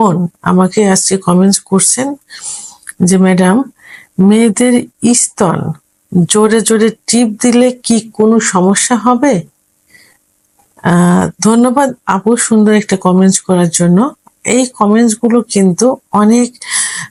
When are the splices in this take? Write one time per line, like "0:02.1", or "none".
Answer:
none